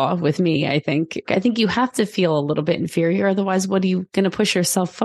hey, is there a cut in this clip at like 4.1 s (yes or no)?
yes